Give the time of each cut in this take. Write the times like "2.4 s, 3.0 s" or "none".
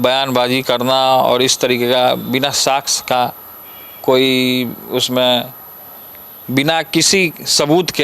none